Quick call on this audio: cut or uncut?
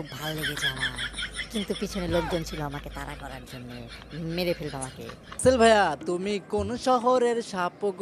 cut